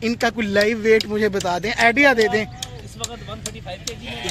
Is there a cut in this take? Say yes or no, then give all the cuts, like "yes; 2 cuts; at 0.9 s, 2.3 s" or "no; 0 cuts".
no; 0 cuts